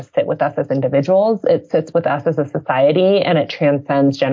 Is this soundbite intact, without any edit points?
yes; 0 cuts

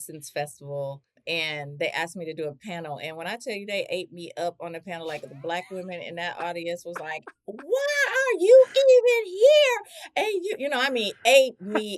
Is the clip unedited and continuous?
no; 1 cut; at 1.2 s

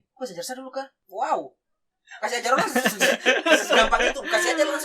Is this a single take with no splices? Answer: no; 1 cut; at 1.0 s

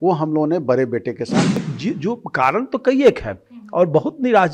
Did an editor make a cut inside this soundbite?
yes; 1 cut; at 1.6 s

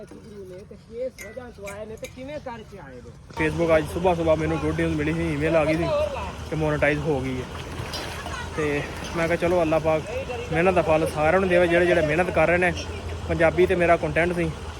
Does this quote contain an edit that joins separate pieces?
yes; 1 cut; at 3.3 s

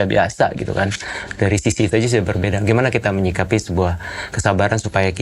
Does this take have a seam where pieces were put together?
no; 0 cuts

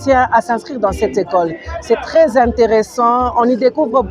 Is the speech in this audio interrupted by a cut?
no; 0 cuts

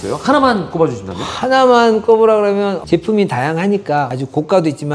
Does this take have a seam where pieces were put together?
yes; 1 cut; at 2.8 s

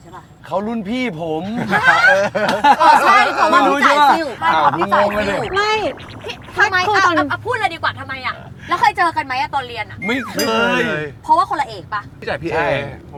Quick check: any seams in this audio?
no; 0 cuts

